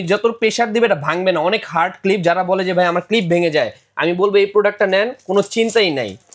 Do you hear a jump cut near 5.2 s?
no; 0 cuts

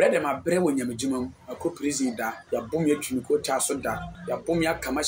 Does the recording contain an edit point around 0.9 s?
no; 2 cuts; at 2.4 s, 4.1 s

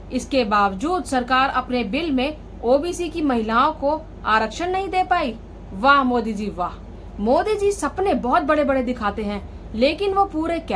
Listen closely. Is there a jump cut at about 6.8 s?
yes; 1 cut; at 6.8 s

